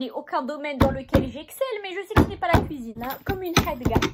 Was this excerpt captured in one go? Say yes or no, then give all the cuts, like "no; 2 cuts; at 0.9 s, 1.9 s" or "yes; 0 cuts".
no; 1 cut; at 3.0 s